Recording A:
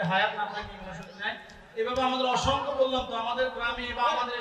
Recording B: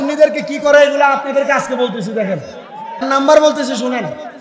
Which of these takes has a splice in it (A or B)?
B